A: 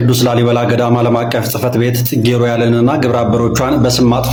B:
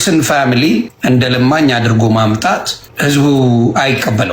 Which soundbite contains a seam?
B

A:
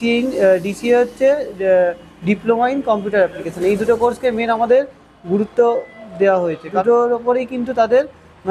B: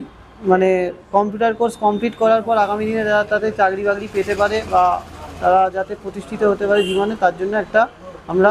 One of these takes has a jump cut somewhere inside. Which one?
A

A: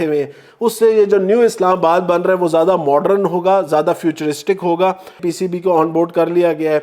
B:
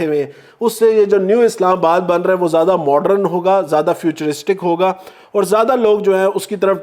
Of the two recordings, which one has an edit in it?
A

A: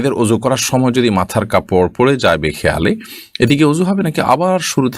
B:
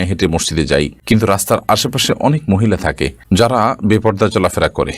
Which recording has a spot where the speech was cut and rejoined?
B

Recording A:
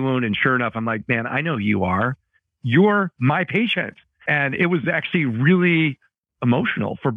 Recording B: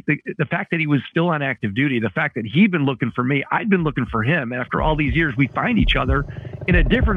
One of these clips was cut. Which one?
A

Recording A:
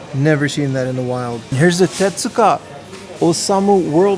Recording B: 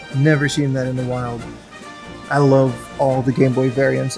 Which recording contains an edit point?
A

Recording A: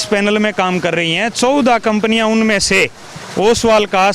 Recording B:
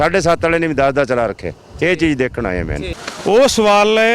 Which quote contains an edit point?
B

